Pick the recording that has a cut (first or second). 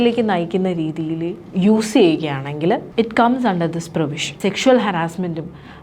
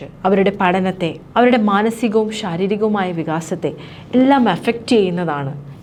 first